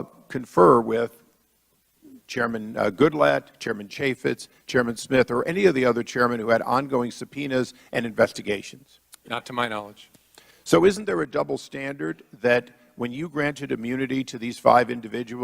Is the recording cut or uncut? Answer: cut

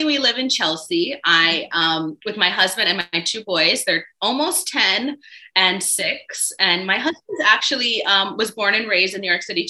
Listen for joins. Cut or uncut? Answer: uncut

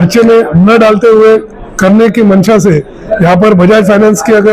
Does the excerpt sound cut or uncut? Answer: uncut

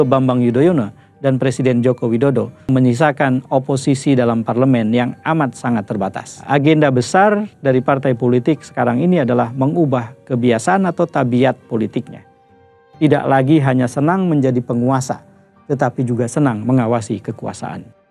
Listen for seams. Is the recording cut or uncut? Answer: cut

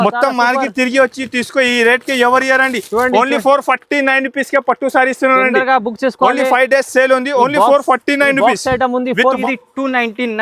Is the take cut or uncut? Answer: cut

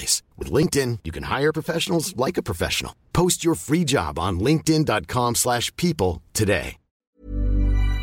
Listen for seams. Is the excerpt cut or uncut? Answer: cut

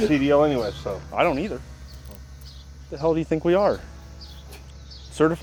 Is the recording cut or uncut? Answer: uncut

